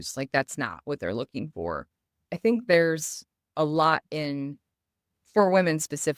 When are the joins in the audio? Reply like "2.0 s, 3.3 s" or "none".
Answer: 2.2 s